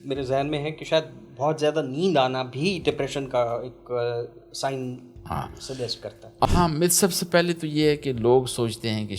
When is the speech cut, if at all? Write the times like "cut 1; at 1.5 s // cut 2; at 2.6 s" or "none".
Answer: cut 1; at 6.5 s